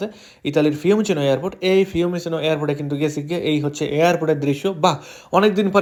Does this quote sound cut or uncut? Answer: uncut